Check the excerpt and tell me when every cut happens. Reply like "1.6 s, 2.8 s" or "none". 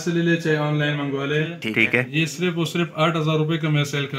1.6 s